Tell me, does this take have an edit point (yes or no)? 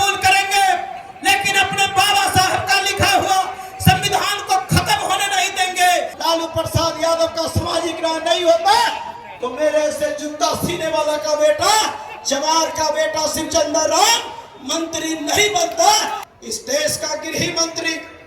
yes